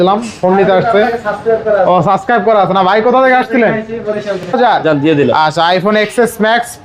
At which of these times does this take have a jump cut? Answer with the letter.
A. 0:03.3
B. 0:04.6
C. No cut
B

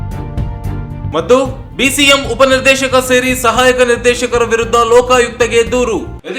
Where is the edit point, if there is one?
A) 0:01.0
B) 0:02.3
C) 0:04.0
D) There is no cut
D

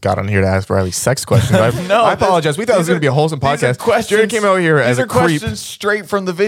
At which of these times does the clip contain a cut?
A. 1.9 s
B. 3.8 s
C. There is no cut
C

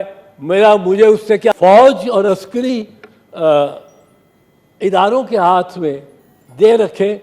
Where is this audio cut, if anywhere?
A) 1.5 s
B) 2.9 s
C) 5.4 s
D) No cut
A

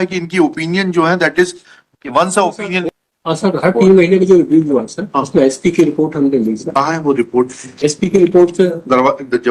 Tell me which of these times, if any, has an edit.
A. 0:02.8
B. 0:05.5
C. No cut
A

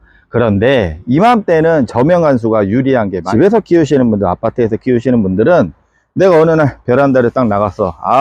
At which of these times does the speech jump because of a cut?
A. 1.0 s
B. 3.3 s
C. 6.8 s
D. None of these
B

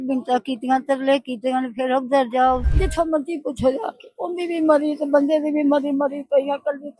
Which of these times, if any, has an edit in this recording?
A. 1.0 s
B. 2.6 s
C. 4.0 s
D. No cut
B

